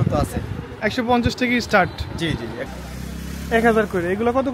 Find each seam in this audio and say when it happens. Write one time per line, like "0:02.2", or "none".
0:02.7